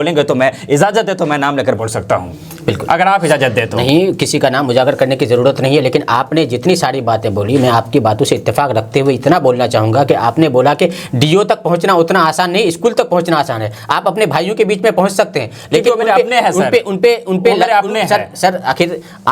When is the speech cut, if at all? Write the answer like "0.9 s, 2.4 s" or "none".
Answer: none